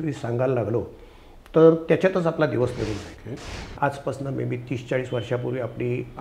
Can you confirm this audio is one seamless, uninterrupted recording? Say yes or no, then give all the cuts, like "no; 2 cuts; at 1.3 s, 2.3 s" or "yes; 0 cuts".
no; 1 cut; at 3.1 s